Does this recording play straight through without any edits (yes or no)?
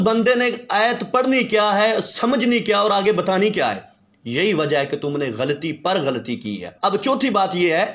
yes